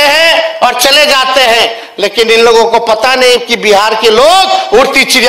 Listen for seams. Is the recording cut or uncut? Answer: uncut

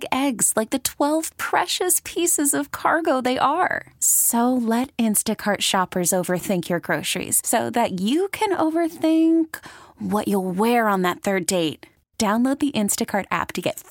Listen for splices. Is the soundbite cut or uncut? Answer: uncut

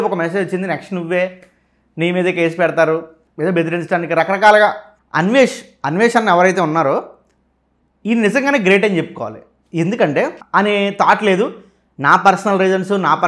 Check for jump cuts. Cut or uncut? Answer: cut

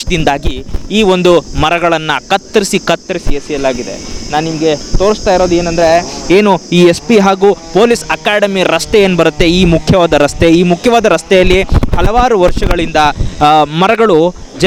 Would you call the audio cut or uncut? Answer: uncut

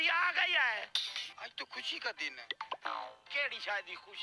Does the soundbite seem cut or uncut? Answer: cut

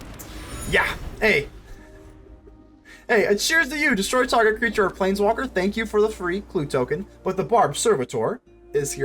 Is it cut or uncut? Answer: uncut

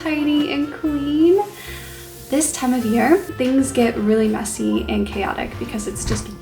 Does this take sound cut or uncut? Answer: cut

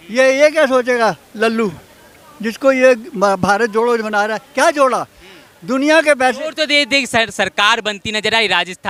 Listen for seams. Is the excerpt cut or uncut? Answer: uncut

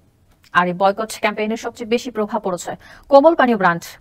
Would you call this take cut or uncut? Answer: uncut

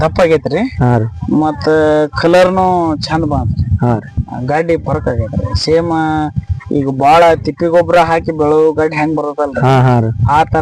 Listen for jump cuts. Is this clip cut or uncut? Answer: uncut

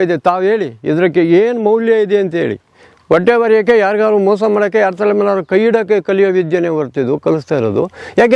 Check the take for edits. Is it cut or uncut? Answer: uncut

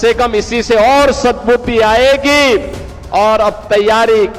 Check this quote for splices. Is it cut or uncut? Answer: uncut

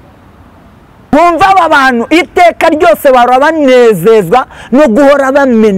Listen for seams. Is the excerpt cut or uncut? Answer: cut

